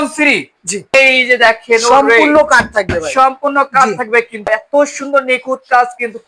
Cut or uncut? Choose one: cut